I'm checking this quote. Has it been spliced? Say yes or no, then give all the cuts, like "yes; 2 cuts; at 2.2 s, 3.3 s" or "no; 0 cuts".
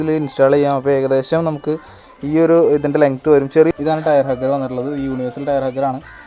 yes; 1 cut; at 3.7 s